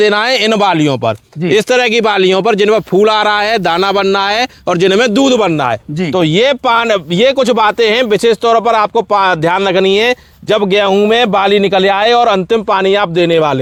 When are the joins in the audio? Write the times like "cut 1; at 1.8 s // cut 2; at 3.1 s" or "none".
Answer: none